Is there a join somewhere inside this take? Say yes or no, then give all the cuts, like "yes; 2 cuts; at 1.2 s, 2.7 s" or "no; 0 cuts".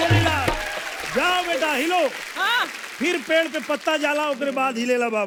no; 0 cuts